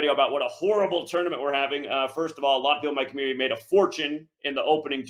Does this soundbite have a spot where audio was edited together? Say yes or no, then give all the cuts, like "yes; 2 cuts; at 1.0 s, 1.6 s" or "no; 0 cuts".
no; 0 cuts